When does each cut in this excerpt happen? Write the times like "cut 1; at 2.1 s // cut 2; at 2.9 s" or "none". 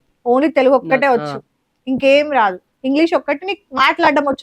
none